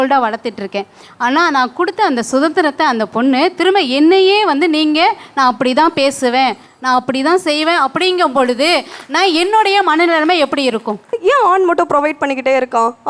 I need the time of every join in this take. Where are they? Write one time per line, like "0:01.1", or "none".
0:11.2